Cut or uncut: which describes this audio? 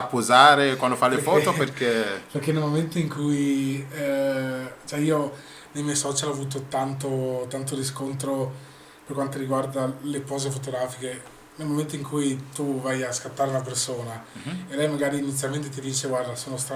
uncut